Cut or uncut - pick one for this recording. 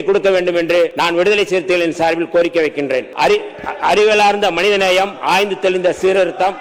cut